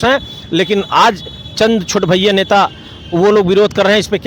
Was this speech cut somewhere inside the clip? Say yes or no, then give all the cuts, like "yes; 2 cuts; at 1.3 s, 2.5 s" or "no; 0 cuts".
no; 0 cuts